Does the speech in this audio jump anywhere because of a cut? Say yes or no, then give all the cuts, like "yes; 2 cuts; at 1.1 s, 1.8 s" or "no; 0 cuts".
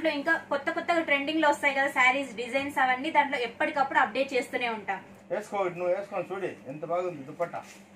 yes; 1 cut; at 5.2 s